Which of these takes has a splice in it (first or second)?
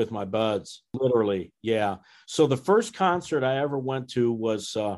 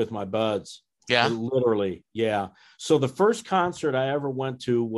first